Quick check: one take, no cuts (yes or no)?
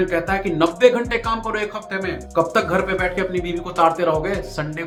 yes